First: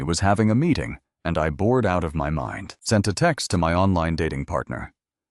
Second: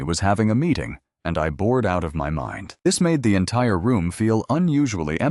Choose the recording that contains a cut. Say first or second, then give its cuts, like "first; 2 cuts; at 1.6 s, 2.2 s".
first; 1 cut; at 2.6 s